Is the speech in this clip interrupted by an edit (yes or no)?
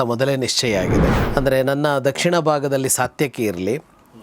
yes